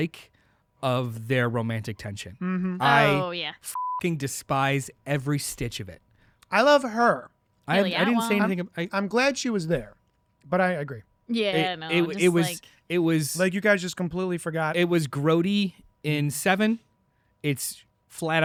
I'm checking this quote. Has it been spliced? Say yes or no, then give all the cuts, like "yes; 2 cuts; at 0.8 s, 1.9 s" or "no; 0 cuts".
no; 0 cuts